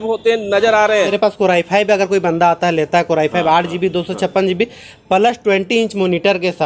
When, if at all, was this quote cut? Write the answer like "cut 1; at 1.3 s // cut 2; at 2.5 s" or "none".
cut 1; at 1.1 s